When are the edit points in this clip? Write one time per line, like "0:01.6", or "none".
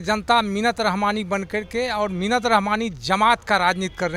none